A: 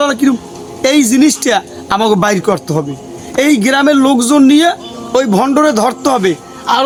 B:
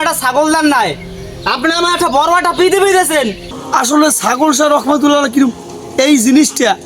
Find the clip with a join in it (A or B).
B